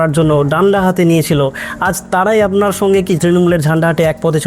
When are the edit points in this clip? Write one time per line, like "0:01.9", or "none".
0:03.2